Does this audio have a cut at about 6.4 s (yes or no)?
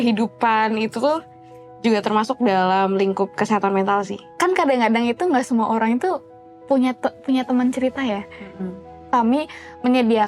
no